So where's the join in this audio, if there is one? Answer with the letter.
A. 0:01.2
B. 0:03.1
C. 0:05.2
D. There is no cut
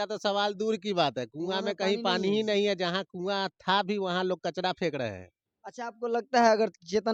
D